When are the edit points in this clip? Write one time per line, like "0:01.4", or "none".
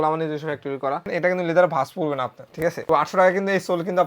0:01.1
0:02.6